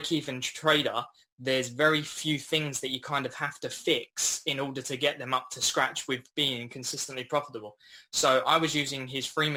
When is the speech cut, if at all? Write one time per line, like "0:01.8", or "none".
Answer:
none

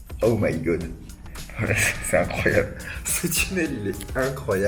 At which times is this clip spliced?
none

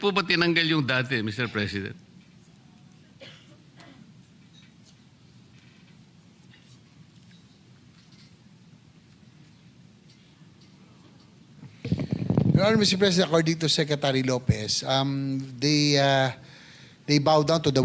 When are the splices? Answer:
none

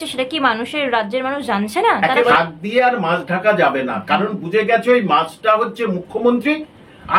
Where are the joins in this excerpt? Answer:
0:02.3

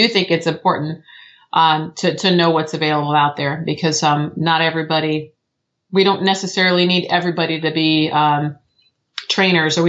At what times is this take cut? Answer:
none

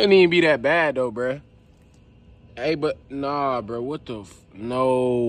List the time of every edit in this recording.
none

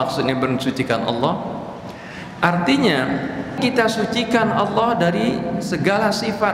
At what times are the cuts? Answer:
0:03.6

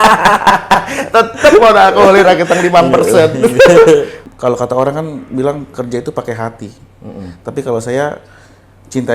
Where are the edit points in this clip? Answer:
0:04.2

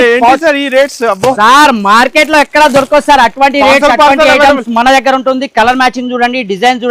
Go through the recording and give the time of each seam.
none

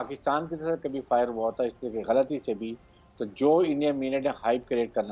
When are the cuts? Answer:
none

